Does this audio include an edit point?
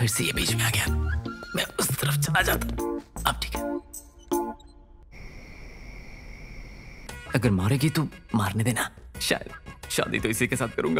yes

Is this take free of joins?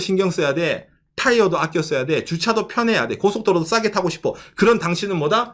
yes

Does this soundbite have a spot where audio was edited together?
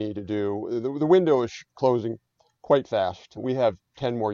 yes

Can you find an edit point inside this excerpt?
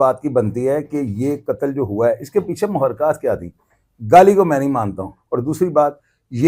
no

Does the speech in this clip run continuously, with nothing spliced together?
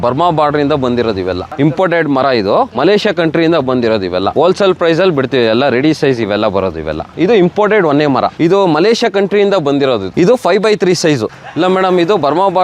no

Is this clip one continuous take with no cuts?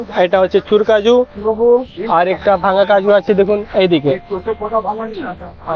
yes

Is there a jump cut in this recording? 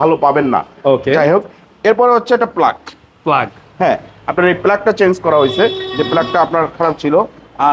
no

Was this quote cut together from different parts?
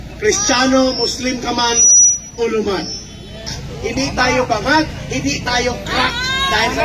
yes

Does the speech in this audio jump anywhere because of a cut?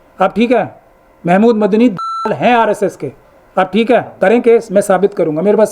yes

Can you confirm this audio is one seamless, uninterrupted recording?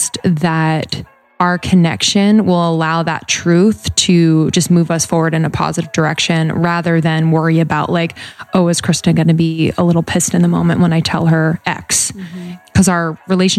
yes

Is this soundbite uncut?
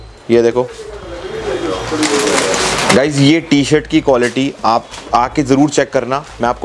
yes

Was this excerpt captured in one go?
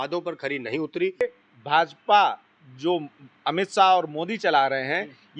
no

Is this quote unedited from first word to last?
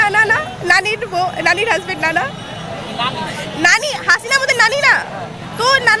yes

